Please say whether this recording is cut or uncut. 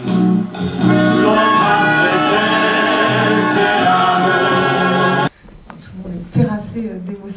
uncut